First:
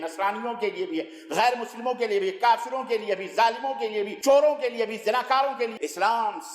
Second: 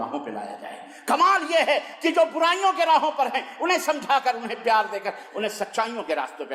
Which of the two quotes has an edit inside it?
first; 2 cuts; at 4.1 s, 5.7 s

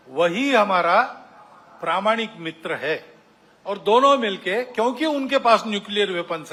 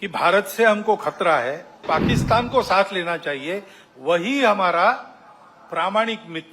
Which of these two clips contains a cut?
second; 1 cut; at 1.8 s

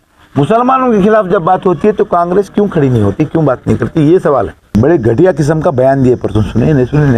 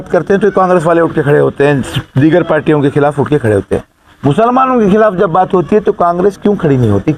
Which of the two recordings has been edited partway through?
first; 1 cut; at 4.6 s

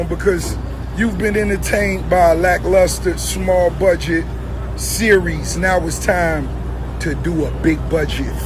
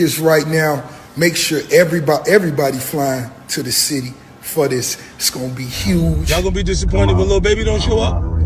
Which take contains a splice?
second; 1 cut; at 6.2 s

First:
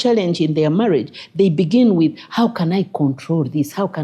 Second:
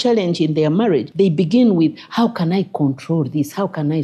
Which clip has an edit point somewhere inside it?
second; 1 cut; at 1.1 s

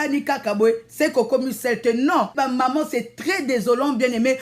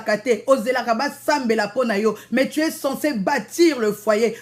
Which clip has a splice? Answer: first; 1 cut; at 2.3 s

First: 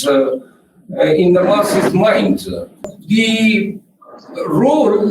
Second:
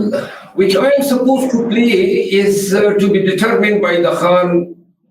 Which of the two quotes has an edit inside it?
first; 1 cut; at 2.9 s

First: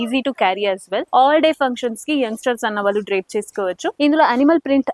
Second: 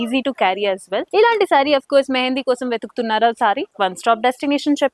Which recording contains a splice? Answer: first; 2 cuts; at 1.1 s, 4.0 s

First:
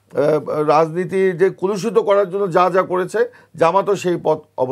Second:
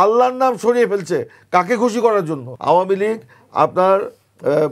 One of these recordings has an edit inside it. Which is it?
second; 1 cut; at 2.5 s

